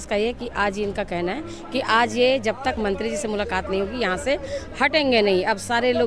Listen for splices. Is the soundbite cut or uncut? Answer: uncut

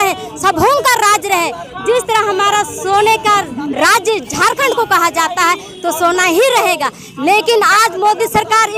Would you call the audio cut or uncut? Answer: uncut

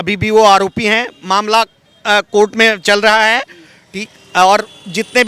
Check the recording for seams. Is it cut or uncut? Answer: uncut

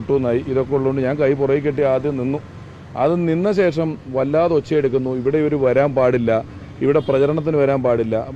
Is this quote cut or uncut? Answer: uncut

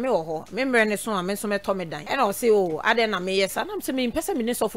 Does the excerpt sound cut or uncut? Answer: cut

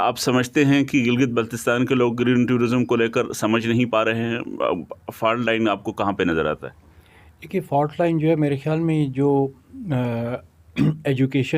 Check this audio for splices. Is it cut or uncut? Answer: uncut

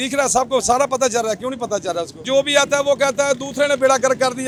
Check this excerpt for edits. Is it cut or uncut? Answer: uncut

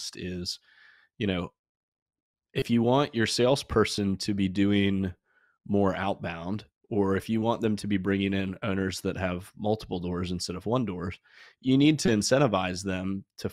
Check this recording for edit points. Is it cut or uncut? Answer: uncut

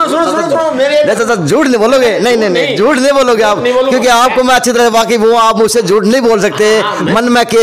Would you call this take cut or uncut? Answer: uncut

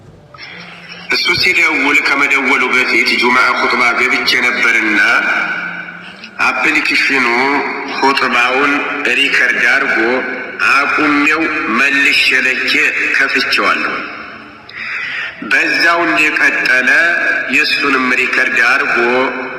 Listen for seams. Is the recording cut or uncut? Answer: uncut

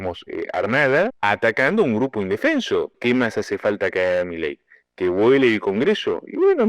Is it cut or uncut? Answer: cut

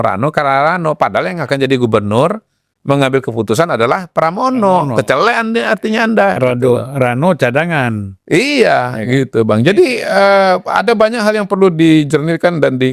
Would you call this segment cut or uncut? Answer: uncut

